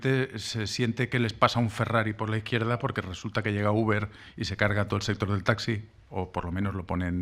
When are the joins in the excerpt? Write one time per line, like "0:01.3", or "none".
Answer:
0:02.2